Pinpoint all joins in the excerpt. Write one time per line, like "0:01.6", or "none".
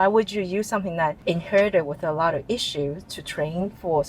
0:01.2

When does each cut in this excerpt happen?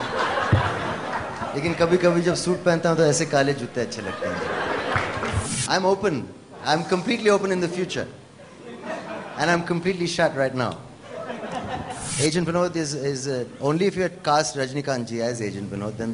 0:05.5
0:12.0

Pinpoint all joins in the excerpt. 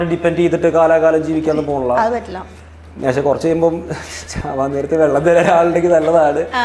none

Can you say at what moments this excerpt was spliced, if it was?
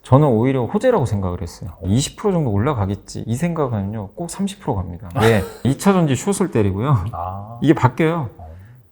0:01.8
0:05.6

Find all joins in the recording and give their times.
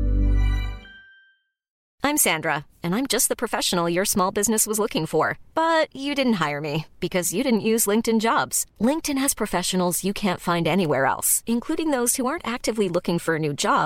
0:01.8

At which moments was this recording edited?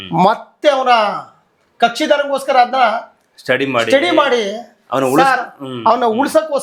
none

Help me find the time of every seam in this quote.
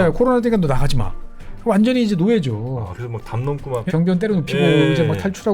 0:03.9

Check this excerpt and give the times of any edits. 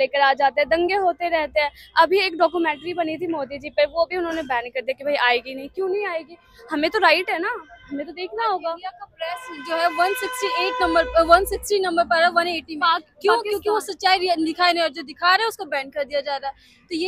none

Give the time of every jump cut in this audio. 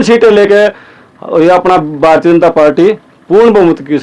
none

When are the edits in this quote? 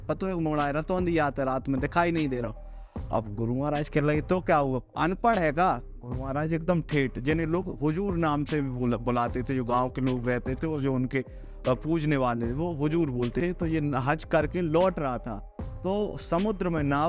0:13.4

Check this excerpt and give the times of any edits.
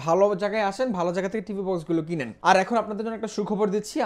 0:02.3

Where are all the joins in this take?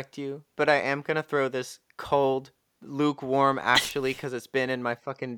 none

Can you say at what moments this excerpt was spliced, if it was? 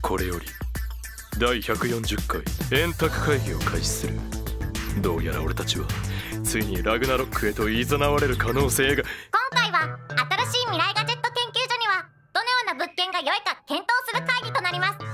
none

